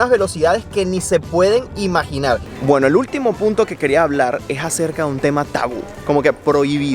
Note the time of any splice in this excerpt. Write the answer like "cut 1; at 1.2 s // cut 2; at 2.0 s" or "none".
cut 1; at 2.4 s // cut 2; at 6.0 s

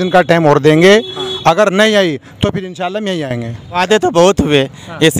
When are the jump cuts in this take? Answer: cut 1; at 3.8 s

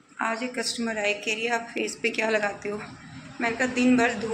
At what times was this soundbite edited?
none

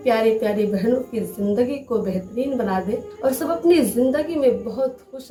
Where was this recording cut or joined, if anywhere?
none

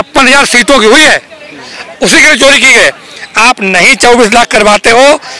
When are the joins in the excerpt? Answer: none

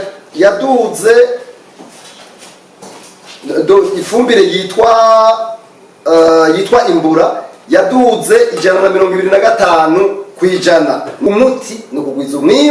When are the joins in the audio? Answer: cut 1; at 11.2 s

